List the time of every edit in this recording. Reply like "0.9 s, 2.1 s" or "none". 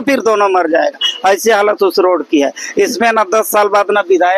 none